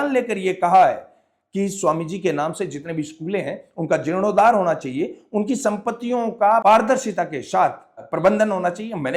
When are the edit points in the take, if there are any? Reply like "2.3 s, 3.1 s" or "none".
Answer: 6.6 s, 8.0 s